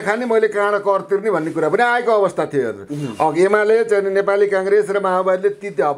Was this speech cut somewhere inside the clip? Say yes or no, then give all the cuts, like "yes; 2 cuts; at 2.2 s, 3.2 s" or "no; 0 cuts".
no; 0 cuts